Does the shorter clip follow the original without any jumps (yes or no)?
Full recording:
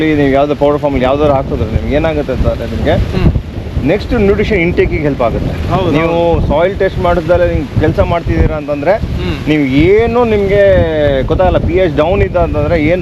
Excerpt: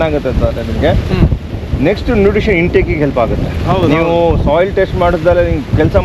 yes